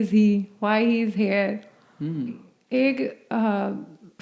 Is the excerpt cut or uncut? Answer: cut